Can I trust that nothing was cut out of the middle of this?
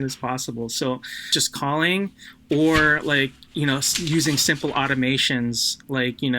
no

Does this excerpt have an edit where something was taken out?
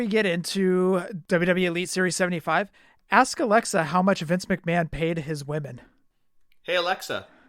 yes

